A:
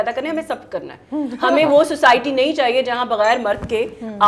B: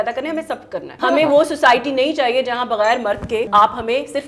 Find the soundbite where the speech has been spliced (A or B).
B